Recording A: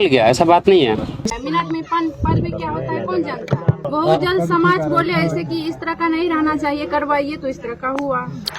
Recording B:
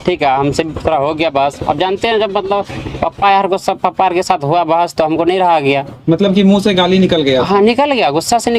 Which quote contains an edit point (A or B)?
A